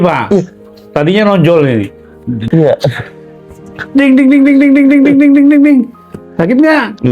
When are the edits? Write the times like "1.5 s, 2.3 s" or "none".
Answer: 2.4 s